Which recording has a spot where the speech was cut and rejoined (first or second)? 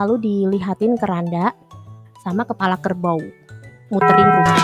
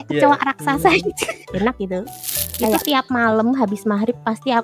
second